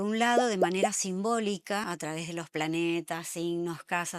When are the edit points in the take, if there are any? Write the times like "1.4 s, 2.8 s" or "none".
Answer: 1.8 s